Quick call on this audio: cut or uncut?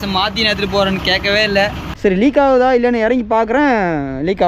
cut